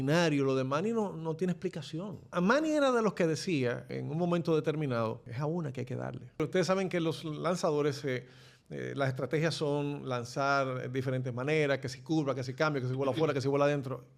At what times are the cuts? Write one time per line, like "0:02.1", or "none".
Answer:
0:02.3
0:03.9
0:05.3
0:06.4